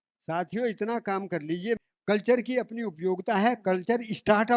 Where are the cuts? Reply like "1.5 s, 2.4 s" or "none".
1.8 s